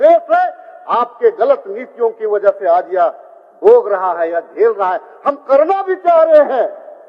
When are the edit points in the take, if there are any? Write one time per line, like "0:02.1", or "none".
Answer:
none